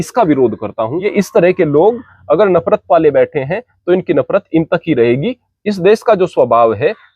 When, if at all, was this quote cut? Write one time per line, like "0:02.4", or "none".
0:01.0